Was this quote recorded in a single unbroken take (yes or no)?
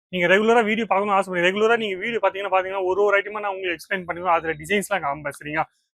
yes